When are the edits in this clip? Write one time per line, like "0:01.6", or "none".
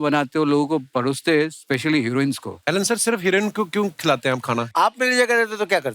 0:02.5
0:04.7